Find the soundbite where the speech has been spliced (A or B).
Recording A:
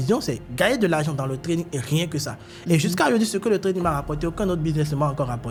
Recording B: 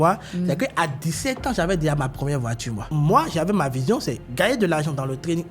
B